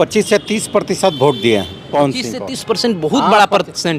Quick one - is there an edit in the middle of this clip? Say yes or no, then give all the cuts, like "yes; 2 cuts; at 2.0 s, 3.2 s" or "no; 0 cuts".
no; 0 cuts